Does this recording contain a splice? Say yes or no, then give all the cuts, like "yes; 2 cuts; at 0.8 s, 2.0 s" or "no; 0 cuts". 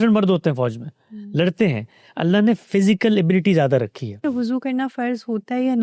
yes; 1 cut; at 4.2 s